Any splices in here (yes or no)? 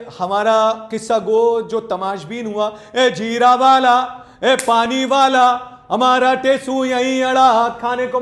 no